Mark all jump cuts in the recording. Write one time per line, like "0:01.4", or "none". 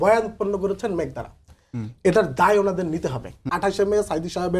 0:03.5